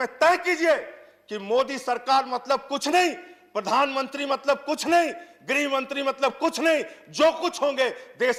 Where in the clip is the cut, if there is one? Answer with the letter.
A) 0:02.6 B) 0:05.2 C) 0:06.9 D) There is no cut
D